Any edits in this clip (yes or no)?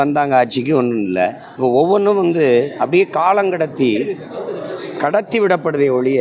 yes